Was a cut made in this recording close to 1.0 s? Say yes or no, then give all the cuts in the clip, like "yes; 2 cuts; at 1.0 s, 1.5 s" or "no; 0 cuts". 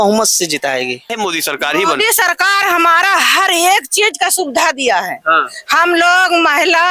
yes; 1 cut; at 1.0 s